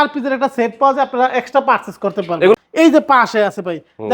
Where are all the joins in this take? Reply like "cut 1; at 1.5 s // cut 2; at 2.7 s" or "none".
cut 1; at 2.6 s